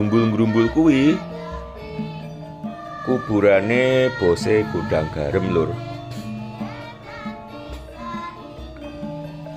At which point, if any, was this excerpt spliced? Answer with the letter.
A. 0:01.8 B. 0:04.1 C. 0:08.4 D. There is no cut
D